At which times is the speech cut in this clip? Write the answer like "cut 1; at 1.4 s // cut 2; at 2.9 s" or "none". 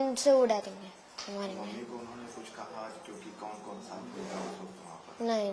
none